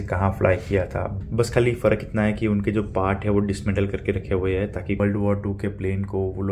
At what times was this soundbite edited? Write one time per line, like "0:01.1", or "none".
0:01.1
0:05.0

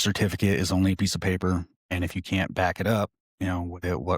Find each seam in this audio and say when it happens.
0:01.8
0:03.2

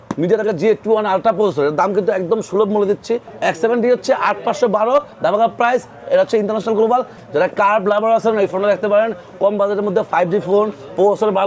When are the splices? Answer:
0:03.3
0:07.2

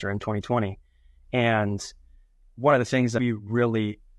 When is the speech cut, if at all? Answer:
0:03.1

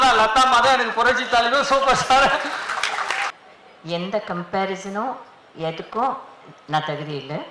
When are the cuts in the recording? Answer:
0:03.3

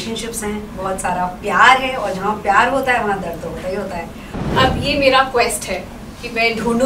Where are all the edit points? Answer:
0:04.5

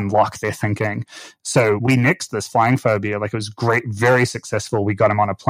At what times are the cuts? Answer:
0:01.8

